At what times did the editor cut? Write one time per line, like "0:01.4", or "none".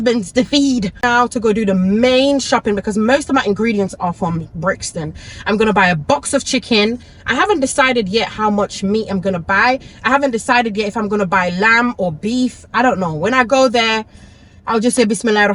0:01.0